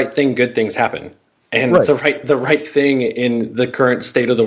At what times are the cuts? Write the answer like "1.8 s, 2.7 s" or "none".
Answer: none